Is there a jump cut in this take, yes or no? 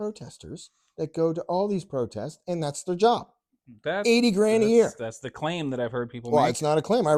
no